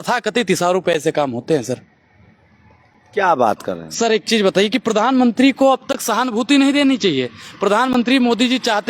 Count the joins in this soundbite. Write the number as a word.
zero